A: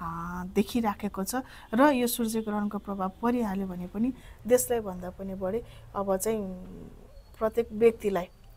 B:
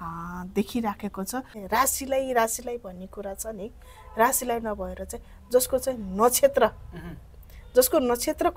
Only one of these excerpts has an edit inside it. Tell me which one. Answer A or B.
B